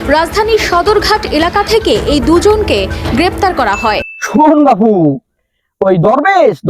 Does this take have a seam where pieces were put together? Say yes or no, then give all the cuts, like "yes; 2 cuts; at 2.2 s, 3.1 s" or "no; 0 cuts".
yes; 1 cut; at 4.1 s